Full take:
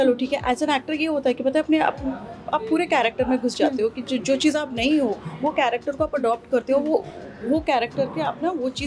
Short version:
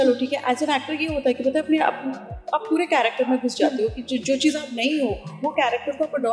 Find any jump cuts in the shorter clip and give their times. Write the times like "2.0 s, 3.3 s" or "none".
none